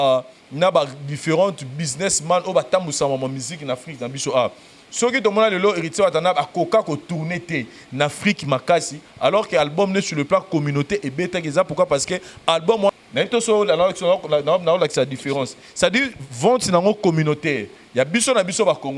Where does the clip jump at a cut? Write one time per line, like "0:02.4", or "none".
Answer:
0:12.9